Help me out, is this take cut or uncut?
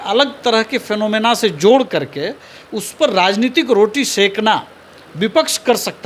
uncut